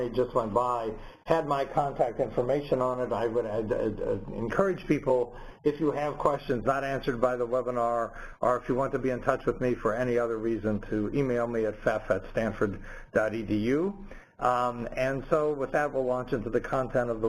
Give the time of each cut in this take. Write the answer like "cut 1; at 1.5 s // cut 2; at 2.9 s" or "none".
cut 1; at 11.5 s